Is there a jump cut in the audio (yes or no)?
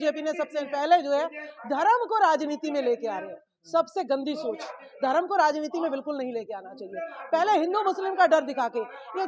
no